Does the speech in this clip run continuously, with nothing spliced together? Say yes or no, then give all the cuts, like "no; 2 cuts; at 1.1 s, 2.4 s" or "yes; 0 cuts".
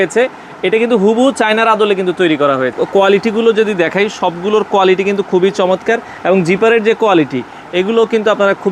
no; 1 cut; at 2.7 s